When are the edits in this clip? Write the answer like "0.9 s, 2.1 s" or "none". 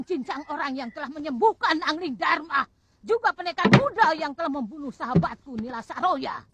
none